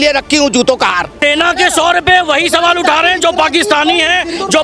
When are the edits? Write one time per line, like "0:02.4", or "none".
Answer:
0:01.2